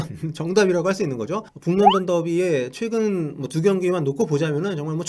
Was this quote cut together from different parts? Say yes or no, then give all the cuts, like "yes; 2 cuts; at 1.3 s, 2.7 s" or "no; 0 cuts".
yes; 1 cut; at 1.5 s